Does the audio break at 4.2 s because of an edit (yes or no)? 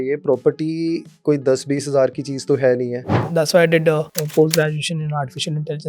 yes